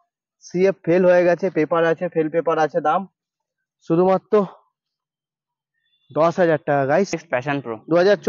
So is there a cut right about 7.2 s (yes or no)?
yes